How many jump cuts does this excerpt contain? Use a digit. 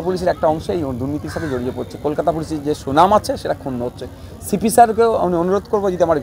0